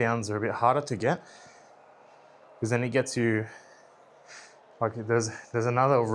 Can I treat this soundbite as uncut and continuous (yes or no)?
yes